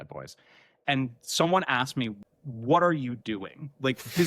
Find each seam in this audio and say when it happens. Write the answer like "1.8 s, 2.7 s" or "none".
0.8 s, 2.2 s